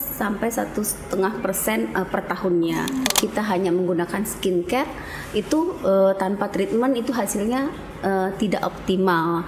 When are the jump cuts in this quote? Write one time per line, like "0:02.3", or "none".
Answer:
0:03.1